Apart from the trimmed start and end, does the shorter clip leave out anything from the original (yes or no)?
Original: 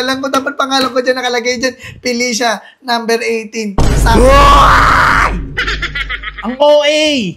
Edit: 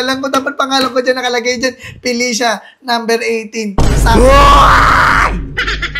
no